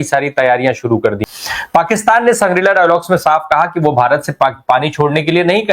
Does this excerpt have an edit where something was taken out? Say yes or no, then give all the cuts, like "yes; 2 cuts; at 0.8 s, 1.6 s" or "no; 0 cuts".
yes; 1 cut; at 1.2 s